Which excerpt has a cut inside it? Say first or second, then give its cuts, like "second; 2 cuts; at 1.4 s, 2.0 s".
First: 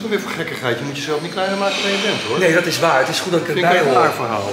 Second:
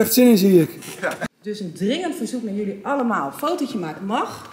second; 1 cut; at 1.3 s